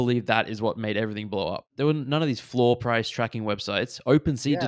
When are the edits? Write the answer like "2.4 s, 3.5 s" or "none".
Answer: 1.7 s